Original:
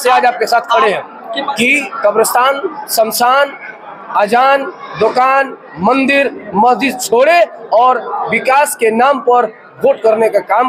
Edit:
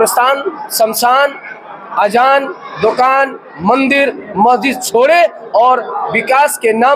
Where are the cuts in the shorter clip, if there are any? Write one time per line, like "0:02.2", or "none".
none